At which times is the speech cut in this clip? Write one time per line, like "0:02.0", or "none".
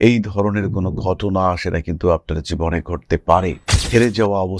0:03.6